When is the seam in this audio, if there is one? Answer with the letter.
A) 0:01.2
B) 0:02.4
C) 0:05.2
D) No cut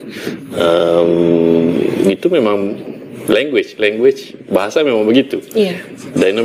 D